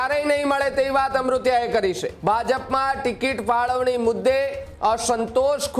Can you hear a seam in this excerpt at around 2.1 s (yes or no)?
yes